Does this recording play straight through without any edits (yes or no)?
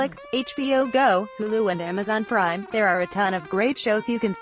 yes